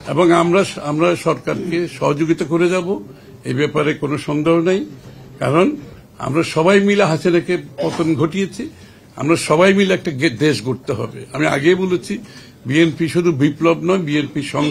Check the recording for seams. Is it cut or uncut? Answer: uncut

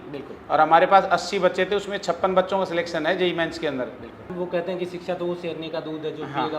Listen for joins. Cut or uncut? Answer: cut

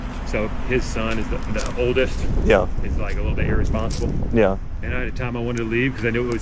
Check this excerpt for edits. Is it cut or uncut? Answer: uncut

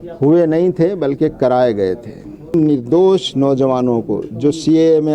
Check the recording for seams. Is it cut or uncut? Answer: cut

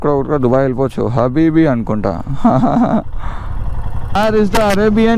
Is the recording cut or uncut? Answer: cut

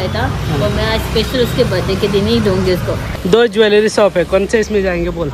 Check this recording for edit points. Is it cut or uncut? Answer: cut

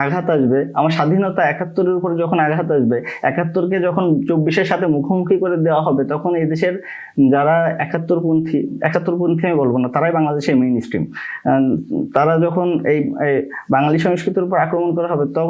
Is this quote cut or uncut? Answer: uncut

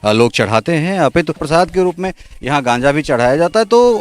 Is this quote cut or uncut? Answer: cut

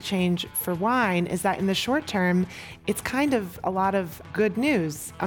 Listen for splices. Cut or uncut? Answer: cut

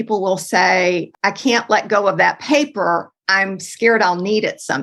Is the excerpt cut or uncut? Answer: cut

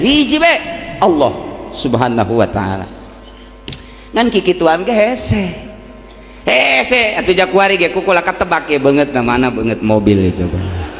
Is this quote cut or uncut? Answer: uncut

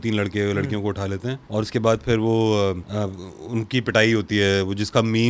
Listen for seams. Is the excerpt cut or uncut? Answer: cut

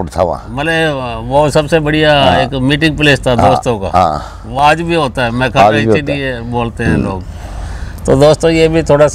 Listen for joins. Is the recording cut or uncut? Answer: uncut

